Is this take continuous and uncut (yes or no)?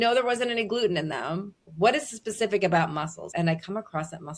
no